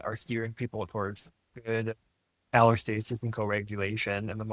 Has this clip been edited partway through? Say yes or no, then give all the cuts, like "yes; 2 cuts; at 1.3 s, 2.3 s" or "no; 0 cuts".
no; 0 cuts